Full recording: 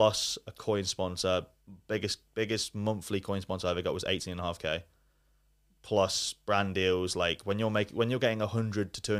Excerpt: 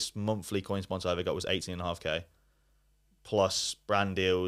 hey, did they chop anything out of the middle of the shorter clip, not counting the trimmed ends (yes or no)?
no